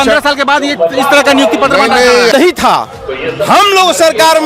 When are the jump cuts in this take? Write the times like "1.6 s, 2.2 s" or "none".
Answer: 2.3 s